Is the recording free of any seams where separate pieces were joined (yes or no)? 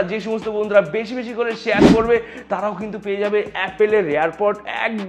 yes